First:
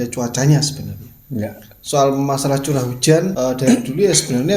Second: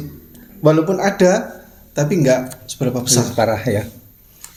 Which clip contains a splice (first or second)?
first